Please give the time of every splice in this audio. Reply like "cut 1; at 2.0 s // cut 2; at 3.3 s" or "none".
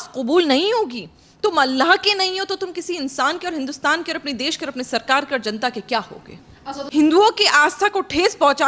cut 1; at 6.8 s